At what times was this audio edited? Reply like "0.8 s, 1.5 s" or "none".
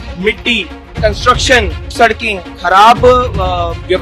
1.9 s